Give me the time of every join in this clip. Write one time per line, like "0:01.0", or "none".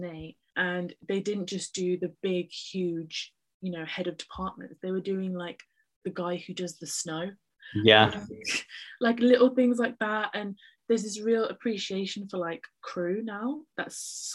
none